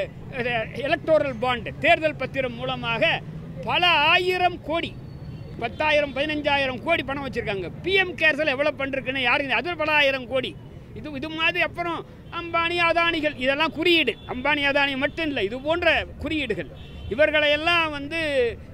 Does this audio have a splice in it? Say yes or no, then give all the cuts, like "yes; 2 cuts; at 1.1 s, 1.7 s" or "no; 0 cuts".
no; 0 cuts